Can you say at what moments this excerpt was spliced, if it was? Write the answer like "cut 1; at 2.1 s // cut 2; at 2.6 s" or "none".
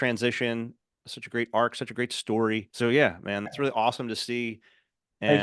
cut 1; at 2.7 s // cut 2; at 3.5 s